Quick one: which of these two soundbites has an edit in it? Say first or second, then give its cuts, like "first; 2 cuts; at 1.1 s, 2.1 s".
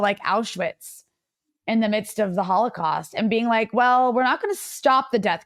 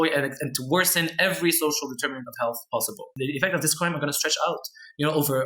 second; 1 cut; at 3.0 s